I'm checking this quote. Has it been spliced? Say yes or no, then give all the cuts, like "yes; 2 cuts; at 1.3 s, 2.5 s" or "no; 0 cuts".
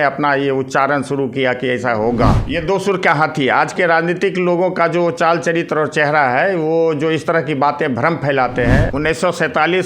yes; 2 cuts; at 2.4 s, 8.9 s